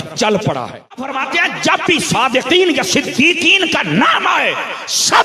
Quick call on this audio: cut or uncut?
cut